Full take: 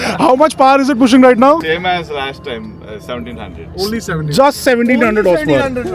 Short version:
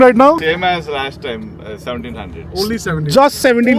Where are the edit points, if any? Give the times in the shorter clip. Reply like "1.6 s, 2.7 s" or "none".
none